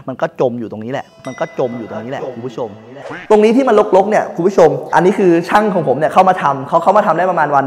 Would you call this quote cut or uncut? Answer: cut